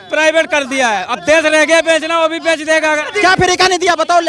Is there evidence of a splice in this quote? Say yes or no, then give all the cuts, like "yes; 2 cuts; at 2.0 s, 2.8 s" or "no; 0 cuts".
yes; 1 cut; at 3.1 s